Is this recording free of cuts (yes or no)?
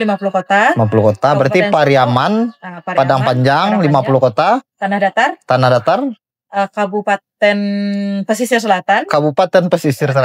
yes